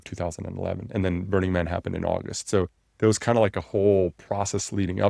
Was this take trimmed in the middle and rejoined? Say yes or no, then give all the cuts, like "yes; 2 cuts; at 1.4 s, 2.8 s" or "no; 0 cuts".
no; 0 cuts